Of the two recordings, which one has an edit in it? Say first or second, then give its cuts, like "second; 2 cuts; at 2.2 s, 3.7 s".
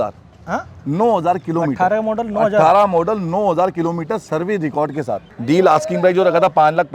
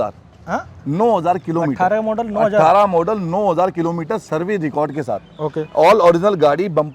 first; 1 cut; at 5.3 s